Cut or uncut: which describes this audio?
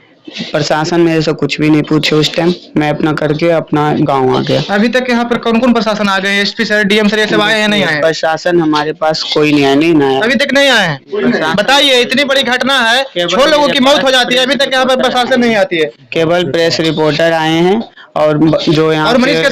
uncut